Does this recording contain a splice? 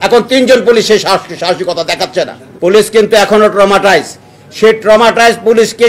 yes; 1 cut; at 2.4 s

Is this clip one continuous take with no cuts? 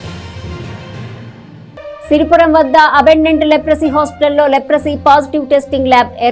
yes; 0 cuts

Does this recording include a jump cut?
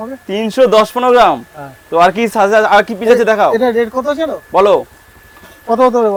no; 0 cuts

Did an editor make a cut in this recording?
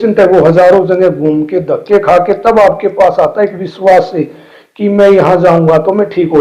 no; 0 cuts

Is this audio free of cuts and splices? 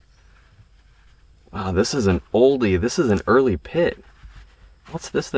yes; 0 cuts

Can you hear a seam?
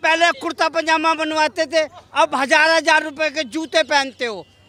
no; 0 cuts

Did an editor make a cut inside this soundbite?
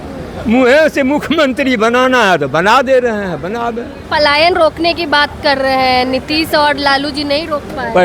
yes; 1 cut; at 3.9 s

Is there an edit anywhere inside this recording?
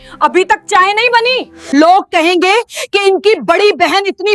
yes; 1 cut; at 1.5 s

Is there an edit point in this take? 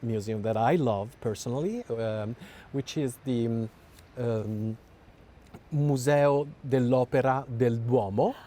no; 0 cuts

